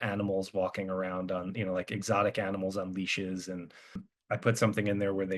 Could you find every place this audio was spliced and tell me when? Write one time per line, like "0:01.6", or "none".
0:04.1